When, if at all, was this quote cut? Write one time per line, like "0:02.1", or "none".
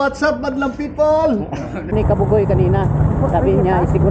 0:01.9